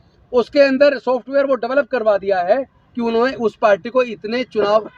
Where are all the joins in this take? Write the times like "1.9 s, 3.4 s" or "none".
none